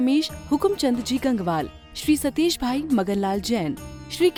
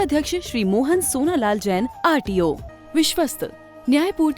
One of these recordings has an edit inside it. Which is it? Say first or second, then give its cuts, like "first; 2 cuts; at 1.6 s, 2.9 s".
second; 1 cut; at 2.7 s